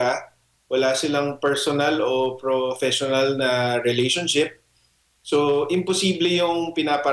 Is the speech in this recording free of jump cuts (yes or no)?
yes